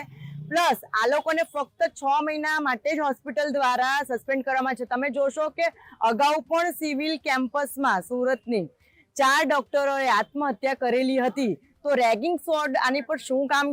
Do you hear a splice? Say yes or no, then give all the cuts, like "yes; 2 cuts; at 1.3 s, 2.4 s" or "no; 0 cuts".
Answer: no; 0 cuts